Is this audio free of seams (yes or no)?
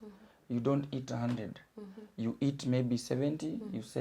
yes